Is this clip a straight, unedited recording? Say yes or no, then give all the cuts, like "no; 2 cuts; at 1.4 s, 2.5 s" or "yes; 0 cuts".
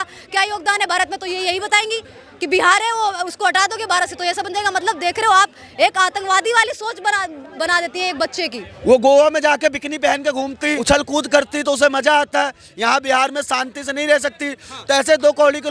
no; 2 cuts; at 8.7 s, 10.8 s